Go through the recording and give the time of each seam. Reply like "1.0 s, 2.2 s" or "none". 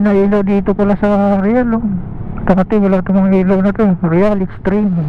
none

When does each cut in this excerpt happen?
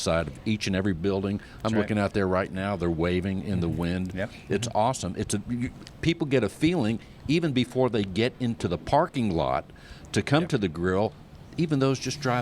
none

